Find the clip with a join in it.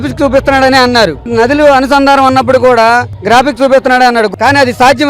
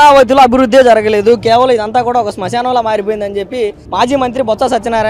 first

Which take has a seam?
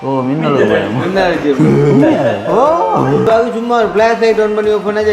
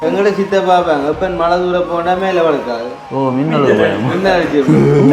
first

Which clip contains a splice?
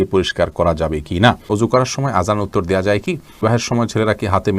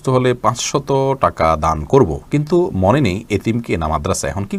first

